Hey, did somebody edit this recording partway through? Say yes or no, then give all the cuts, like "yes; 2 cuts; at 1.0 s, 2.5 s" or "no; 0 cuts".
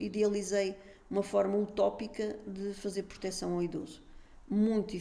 no; 0 cuts